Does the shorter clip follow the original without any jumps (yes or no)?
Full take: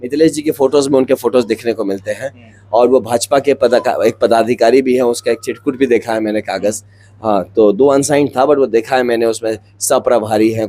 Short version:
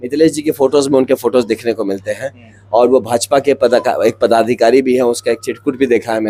yes